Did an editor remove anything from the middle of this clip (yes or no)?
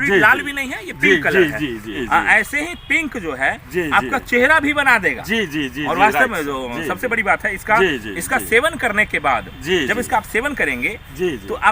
yes